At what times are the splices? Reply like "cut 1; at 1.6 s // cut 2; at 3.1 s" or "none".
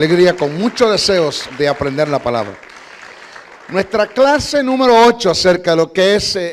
none